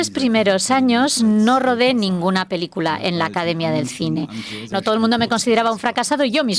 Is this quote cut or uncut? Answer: cut